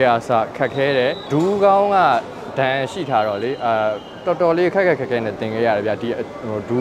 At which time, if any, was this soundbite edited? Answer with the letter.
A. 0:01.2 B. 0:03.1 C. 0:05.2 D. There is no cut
A